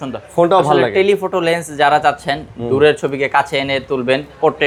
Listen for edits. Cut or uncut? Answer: uncut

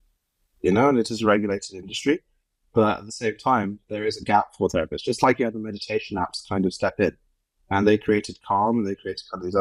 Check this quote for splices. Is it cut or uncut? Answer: uncut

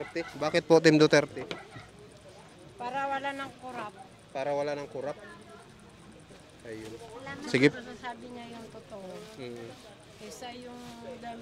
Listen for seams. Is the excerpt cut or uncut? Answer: uncut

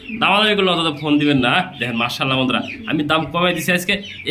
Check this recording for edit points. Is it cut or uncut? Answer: uncut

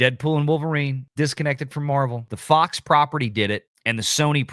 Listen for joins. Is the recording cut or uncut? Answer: cut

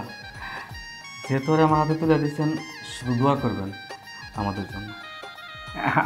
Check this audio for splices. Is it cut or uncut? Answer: uncut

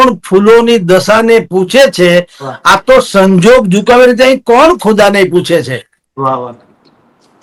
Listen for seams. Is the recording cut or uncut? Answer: uncut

